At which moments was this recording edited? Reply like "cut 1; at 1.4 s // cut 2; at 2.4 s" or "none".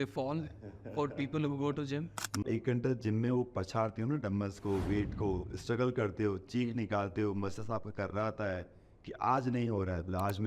cut 1; at 2.4 s